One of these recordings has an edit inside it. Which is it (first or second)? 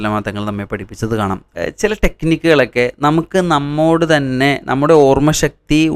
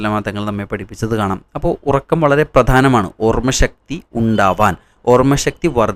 first